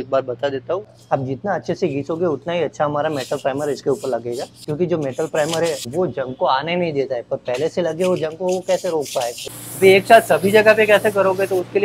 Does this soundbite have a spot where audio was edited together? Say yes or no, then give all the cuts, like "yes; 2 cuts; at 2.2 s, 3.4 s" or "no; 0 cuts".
yes; 4 cuts; at 0.9 s, 4.5 s, 5.8 s, 9.5 s